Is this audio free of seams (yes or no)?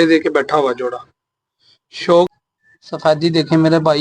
no